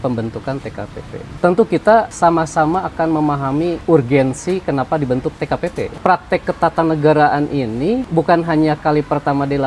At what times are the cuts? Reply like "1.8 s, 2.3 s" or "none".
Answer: 1.2 s, 2.1 s, 3.8 s, 5.9 s, 8.1 s